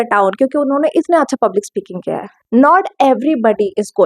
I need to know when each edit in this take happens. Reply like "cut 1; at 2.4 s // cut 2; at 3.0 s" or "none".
cut 1; at 2.3 s